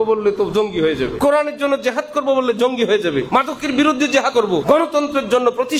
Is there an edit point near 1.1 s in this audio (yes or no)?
yes